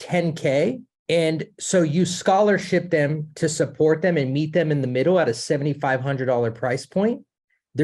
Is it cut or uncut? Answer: cut